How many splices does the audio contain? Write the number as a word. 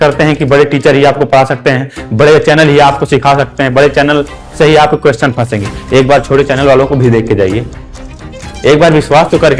zero